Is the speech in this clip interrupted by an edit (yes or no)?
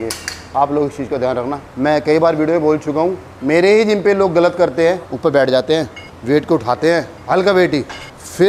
yes